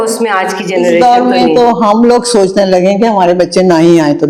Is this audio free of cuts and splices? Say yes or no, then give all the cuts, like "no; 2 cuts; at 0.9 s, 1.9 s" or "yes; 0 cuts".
yes; 0 cuts